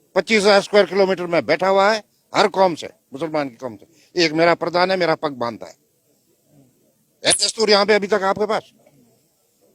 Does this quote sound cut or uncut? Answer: uncut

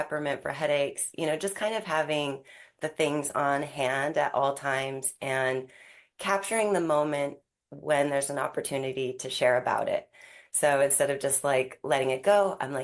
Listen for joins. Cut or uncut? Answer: uncut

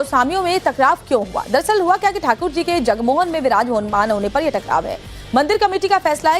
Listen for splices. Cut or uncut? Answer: cut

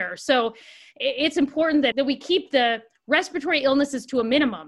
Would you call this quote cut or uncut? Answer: cut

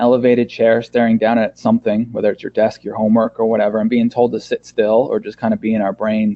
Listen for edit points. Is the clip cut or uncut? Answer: uncut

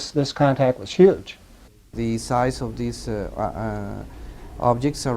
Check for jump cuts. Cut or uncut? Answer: cut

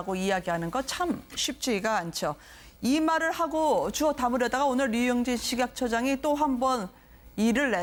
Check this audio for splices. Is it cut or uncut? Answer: uncut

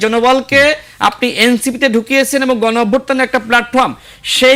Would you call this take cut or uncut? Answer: uncut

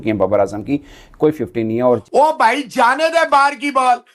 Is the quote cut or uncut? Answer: cut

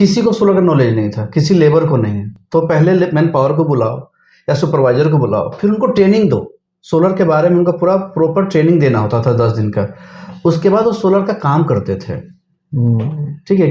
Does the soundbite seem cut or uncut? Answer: uncut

